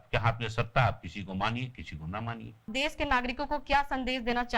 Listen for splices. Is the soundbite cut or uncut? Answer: uncut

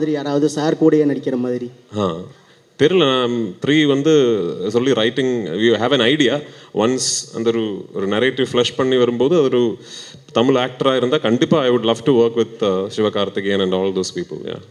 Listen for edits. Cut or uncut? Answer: uncut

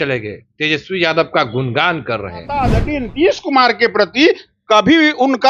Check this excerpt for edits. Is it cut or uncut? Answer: cut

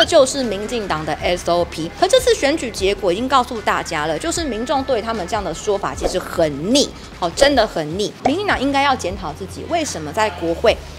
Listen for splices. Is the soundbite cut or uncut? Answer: cut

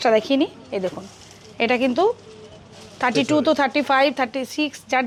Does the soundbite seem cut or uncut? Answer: uncut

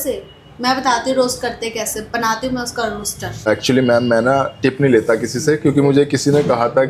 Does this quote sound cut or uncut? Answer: cut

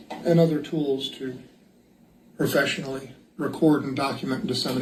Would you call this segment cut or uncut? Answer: uncut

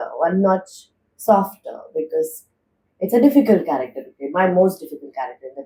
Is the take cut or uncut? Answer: uncut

